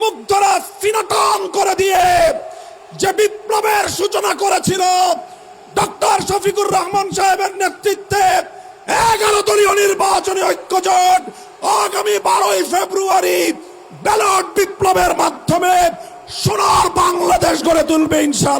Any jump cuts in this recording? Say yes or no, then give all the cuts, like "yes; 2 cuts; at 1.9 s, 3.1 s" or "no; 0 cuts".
no; 0 cuts